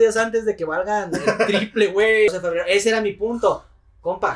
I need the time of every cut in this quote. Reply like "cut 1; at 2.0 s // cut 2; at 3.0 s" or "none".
cut 1; at 2.3 s

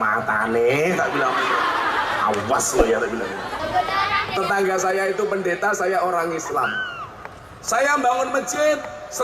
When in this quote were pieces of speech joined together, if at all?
cut 1; at 3.6 s

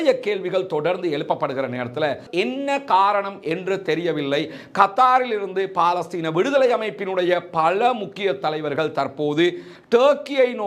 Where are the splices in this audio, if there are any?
cut 1; at 2.3 s

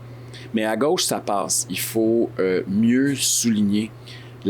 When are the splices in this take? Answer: cut 1; at 1.7 s

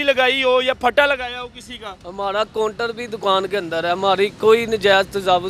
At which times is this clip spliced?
none

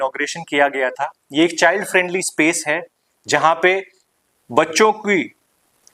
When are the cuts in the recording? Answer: none

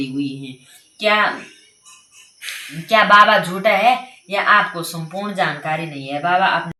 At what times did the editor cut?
none

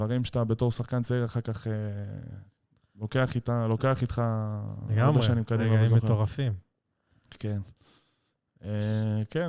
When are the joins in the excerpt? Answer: none

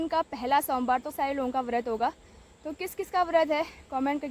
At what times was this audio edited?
cut 1; at 1.1 s

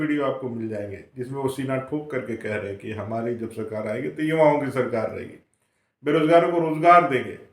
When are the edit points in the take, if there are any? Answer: none

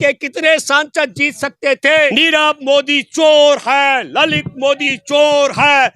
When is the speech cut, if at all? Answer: cut 1; at 2.1 s

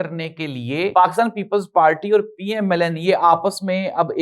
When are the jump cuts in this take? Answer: cut 1; at 0.9 s

